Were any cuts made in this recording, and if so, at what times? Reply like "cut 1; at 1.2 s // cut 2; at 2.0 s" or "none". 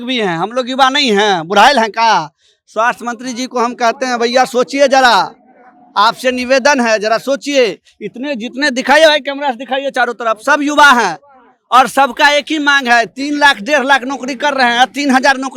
none